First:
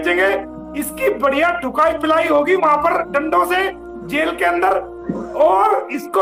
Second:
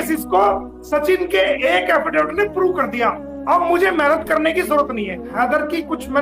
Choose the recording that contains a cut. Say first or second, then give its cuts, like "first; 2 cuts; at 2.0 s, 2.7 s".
second; 1 cut; at 5.2 s